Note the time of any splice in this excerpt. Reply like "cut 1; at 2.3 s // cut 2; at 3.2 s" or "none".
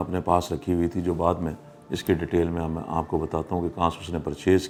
none